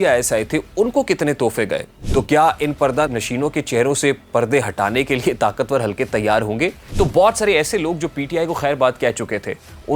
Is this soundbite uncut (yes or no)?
no